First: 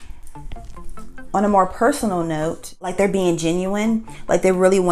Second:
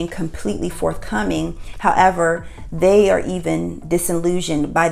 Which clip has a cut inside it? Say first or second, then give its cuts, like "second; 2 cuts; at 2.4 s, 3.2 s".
first; 1 cut; at 2.9 s